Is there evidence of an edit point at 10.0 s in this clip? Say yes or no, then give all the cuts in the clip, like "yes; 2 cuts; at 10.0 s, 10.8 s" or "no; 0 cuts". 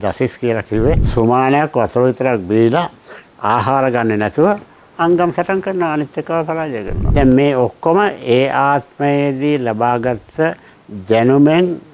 no; 2 cuts; at 1.0 s, 7.0 s